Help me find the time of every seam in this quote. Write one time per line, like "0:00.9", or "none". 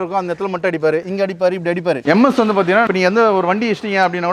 0:02.0
0:02.9